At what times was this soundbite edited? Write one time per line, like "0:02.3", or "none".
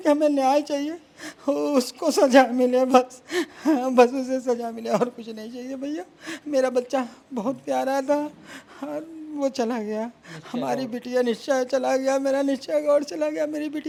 none